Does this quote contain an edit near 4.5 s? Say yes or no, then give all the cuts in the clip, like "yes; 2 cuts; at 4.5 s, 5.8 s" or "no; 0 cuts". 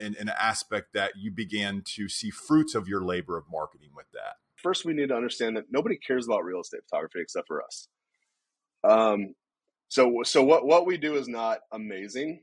yes; 1 cut; at 4.5 s